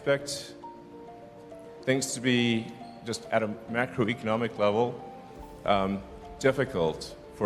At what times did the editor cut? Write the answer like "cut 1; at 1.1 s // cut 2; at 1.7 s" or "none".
none